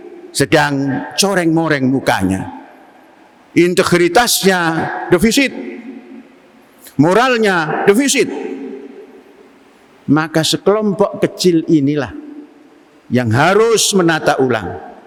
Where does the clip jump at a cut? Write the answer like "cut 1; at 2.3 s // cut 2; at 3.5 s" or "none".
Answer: none